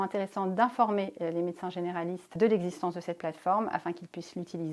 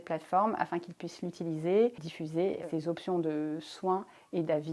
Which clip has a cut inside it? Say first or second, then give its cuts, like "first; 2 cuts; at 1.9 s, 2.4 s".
second; 1 cut; at 2.6 s